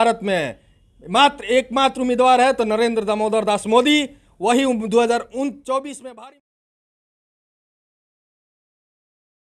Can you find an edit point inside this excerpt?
no; 0 cuts

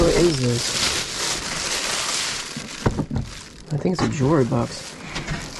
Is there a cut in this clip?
no; 0 cuts

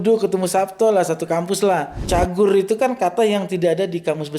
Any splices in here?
yes; 1 cut; at 1.9 s

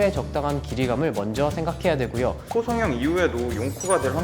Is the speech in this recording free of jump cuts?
no; 1 cut; at 2.4 s

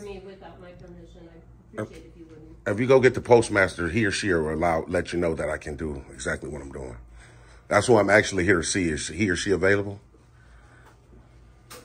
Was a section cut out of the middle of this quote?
no; 0 cuts

